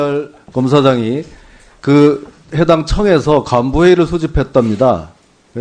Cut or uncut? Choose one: uncut